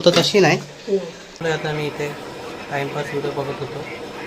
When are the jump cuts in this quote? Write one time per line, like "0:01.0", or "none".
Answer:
0:01.3